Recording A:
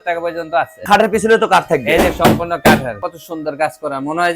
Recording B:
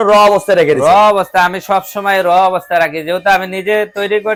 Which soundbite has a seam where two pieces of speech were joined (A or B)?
A